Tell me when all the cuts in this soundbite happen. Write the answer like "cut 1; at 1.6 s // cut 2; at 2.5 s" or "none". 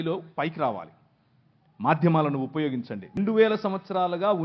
cut 1; at 3.1 s